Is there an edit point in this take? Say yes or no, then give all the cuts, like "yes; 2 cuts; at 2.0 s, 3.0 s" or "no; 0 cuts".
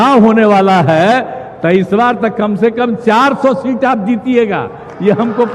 no; 0 cuts